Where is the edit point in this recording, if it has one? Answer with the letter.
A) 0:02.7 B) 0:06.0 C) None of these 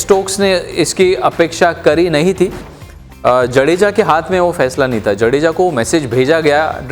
A